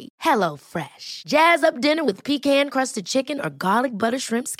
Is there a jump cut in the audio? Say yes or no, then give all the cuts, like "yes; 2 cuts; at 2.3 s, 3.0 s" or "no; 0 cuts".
no; 0 cuts